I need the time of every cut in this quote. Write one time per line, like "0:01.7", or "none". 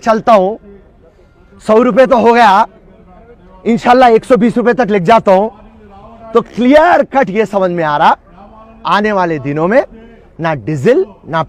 none

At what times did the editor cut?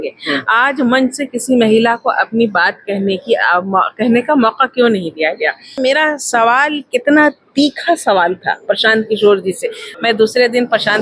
0:05.7
0:09.8

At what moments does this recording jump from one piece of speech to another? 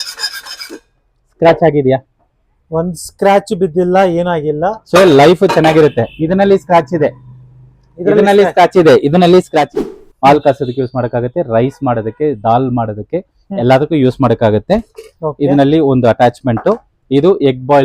0:09.8

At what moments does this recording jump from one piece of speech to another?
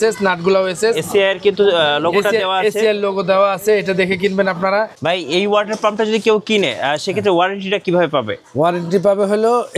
0:04.9

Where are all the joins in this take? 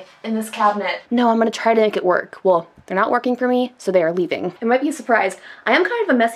0:00.9
0:04.5

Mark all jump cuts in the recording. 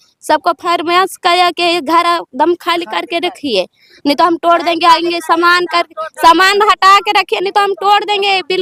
none

